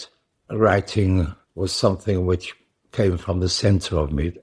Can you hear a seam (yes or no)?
yes